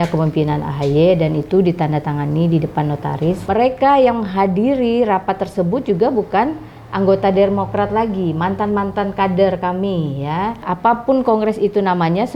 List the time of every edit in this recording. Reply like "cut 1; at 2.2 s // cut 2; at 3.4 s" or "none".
cut 1; at 3.4 s // cut 2; at 10.6 s